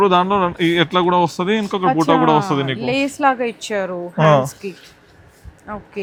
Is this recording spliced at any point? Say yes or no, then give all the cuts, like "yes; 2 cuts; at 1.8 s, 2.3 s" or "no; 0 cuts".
no; 0 cuts